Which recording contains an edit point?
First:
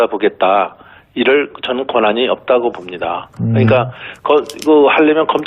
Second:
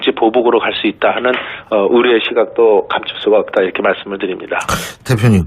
first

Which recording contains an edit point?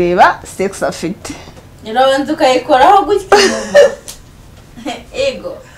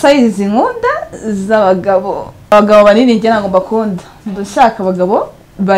second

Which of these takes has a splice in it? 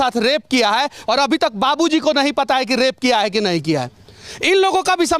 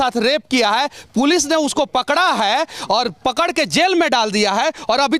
first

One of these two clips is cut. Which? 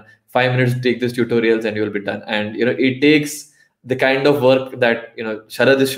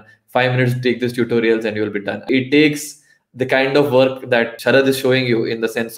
second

